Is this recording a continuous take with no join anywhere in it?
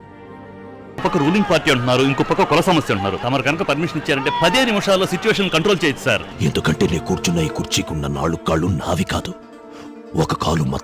no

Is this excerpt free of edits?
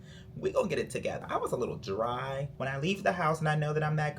no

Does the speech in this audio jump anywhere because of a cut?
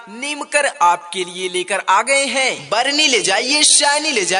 yes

